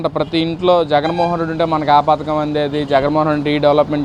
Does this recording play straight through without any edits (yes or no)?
yes